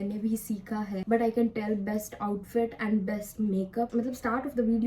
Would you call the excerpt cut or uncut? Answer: cut